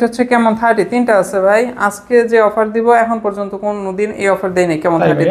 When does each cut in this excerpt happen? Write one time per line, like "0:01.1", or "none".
none